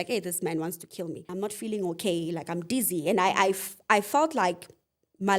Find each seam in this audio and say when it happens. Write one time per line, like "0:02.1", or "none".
0:01.3